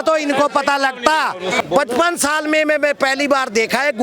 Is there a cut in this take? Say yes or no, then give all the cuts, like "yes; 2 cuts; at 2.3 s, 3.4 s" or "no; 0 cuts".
yes; 1 cut; at 1.6 s